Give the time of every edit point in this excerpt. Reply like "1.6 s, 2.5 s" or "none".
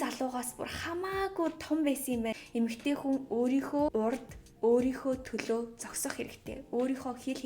2.4 s, 3.9 s